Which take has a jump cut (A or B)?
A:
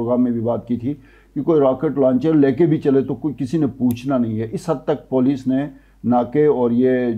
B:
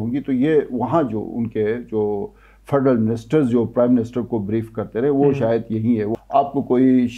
B